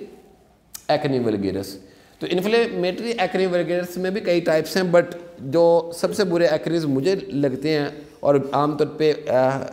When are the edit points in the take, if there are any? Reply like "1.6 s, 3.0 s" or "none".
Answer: none